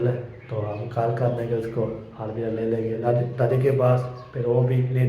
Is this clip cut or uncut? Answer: cut